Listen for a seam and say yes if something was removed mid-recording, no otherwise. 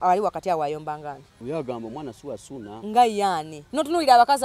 yes